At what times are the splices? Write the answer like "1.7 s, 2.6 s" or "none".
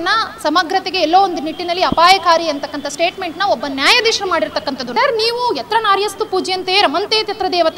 4.9 s